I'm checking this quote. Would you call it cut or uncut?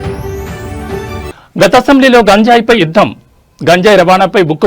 cut